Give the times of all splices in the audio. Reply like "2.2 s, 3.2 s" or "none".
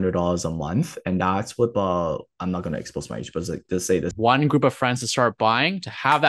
4.1 s